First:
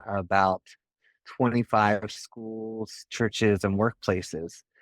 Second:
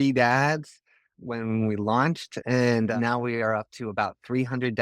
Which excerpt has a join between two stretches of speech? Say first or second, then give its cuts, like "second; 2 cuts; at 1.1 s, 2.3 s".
second; 1 cut; at 2.3 s